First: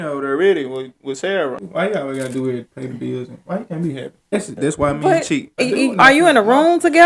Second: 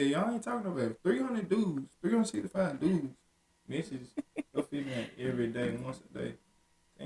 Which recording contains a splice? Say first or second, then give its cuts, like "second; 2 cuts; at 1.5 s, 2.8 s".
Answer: first; 3 cuts; at 1.6 s, 4.3 s, 5.6 s